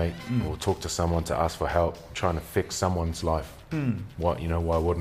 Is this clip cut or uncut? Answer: cut